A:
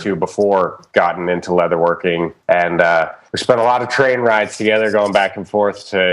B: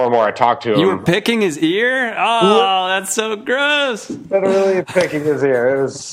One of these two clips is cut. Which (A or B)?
A